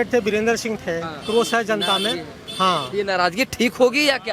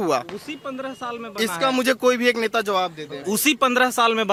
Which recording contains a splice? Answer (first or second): first